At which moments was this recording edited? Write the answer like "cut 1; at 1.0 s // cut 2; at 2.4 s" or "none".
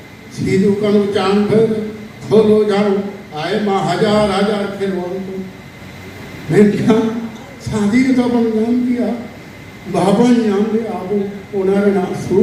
none

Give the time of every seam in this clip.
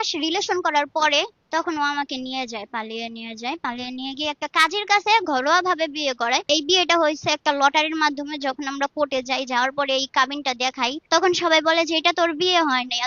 cut 1; at 1.4 s // cut 2; at 6.5 s // cut 3; at 11.0 s

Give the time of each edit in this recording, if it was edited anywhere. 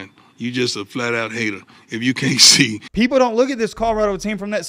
cut 1; at 2.8 s

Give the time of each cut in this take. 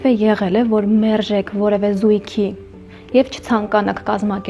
none

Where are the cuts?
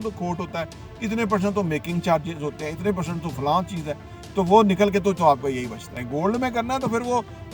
cut 1; at 6.0 s

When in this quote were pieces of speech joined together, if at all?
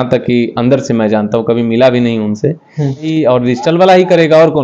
cut 1; at 3.1 s

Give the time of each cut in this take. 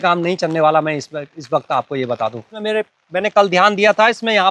cut 1; at 2.5 s

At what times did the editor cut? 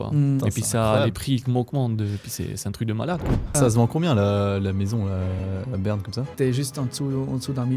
cut 1; at 3.6 s // cut 2; at 6.3 s

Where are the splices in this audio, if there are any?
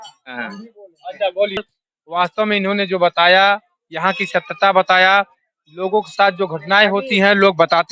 cut 1; at 1.7 s

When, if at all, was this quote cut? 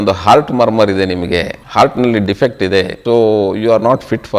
cut 1; at 1.6 s // cut 2; at 3.0 s

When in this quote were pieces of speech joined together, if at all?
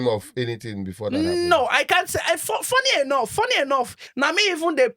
cut 1; at 4.0 s

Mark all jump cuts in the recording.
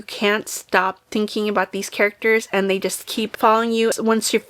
none

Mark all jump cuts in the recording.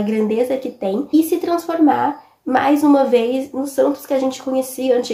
cut 1; at 1.1 s

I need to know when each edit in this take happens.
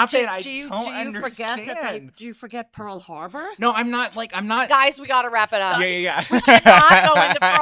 none

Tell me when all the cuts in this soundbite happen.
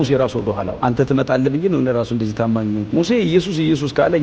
none

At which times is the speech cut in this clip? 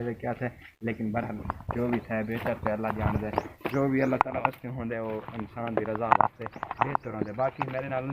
none

